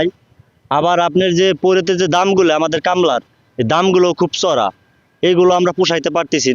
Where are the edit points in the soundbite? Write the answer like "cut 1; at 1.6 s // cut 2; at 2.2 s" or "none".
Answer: none